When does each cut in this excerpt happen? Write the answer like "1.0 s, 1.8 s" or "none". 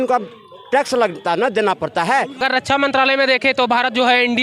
2.4 s

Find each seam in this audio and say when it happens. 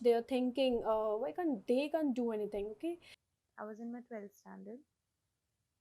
3.1 s

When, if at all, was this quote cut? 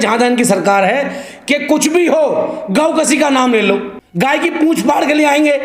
4.0 s

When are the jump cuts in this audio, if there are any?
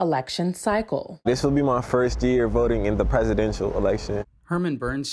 4.2 s

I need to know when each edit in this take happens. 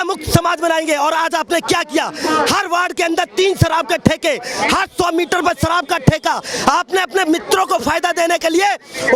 none

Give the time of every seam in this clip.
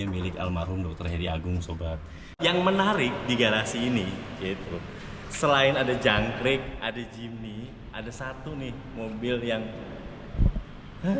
2.3 s

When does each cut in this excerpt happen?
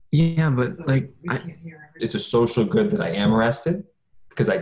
1.9 s

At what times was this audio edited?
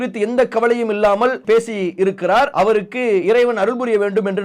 1.4 s, 2.5 s

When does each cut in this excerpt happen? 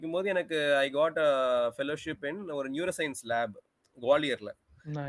none

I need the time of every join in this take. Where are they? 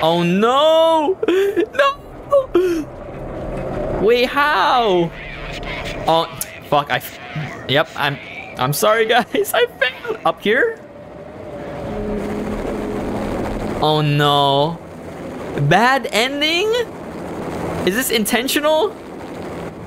none

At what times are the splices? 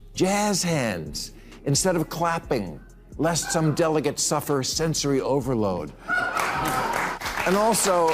7.2 s

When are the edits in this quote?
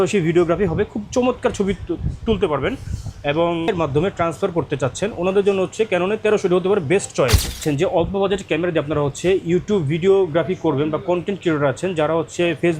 3.7 s, 7.6 s

